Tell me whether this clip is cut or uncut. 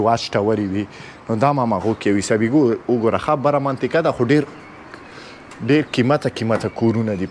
uncut